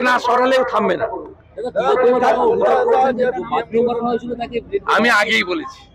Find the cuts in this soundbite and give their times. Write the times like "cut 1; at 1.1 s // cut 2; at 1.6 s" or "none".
cut 1; at 0.9 s